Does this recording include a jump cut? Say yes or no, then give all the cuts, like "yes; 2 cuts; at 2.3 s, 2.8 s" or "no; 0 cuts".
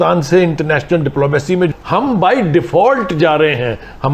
yes; 1 cut; at 1.7 s